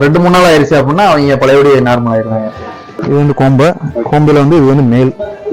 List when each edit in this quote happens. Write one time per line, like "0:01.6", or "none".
0:03.0